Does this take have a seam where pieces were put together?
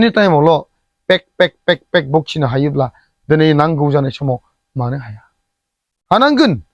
no; 0 cuts

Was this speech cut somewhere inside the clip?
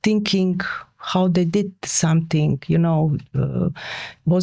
no; 0 cuts

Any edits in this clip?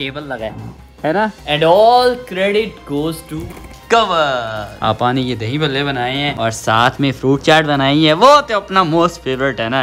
yes; 2 cuts; at 1.4 s, 4.7 s

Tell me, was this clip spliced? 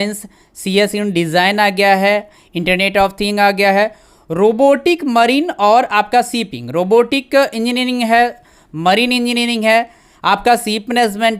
no; 0 cuts

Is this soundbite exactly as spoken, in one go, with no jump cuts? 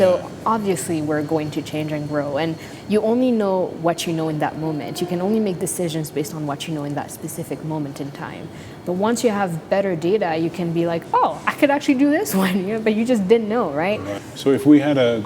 no; 1 cut; at 14.2 s

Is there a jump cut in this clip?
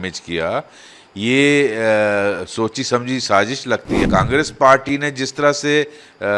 yes; 1 cut; at 4.0 s

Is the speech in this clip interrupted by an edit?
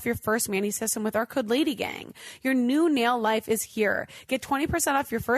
no; 0 cuts

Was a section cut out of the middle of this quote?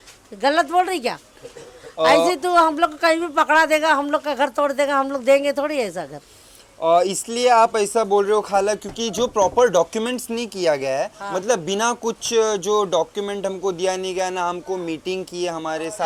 no; 0 cuts

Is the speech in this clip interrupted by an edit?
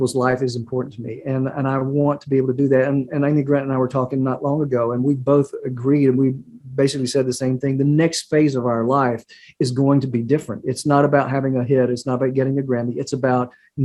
no; 0 cuts

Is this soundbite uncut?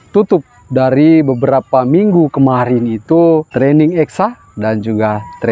no; 1 cut; at 3.5 s

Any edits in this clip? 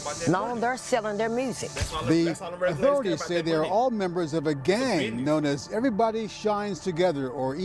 yes; 1 cut; at 1.6 s

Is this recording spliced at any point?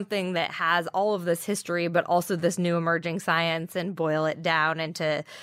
no; 0 cuts

